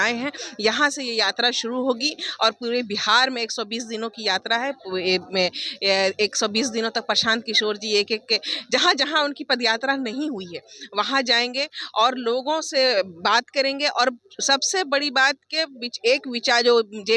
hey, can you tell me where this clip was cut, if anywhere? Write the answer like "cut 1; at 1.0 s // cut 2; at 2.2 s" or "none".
none